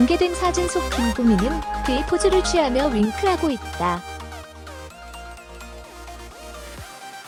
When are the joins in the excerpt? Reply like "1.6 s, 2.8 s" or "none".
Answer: none